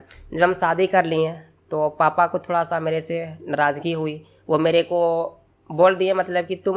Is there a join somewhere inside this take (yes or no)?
no